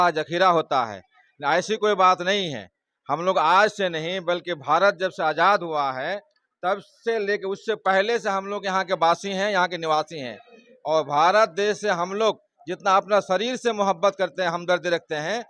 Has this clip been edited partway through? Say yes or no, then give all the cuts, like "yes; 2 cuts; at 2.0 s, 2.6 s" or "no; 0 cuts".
no; 0 cuts